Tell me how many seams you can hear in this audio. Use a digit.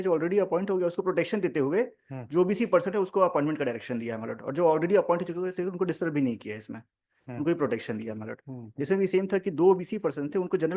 0